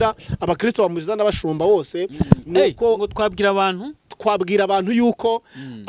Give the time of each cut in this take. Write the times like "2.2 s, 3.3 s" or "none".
none